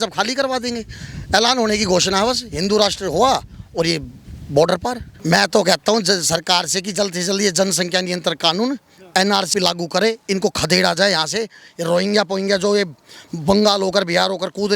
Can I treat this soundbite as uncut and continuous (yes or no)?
no